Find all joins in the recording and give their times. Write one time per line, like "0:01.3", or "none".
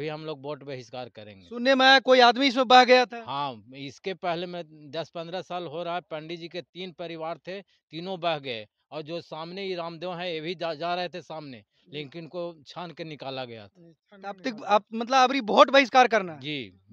none